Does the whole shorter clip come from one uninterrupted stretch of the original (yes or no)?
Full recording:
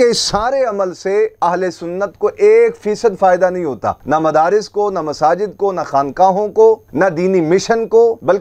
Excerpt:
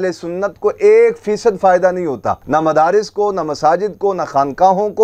yes